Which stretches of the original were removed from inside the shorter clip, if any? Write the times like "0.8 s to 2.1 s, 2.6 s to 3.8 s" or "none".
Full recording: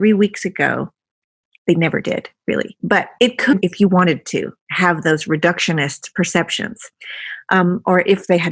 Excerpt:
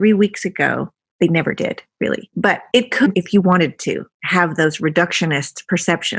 1.0 s to 1.4 s

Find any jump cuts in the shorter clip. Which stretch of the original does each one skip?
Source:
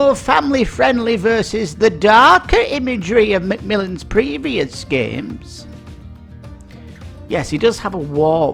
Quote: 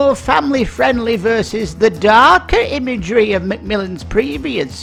none

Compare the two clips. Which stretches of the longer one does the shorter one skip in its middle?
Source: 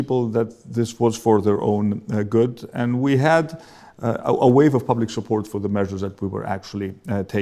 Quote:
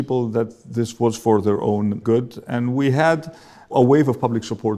2.0 s to 2.3 s, 4.0 s to 4.4 s

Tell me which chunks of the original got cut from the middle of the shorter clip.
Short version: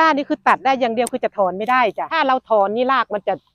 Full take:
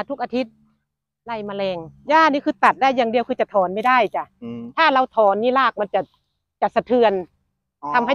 4.2 s to 4.7 s

